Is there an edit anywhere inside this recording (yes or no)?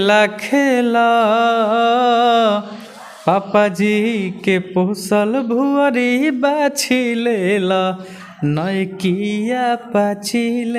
no